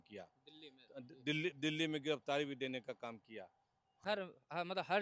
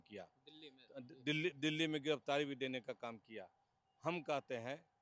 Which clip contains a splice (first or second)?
first